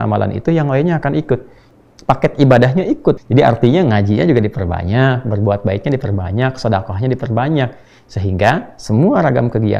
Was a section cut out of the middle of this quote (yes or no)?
yes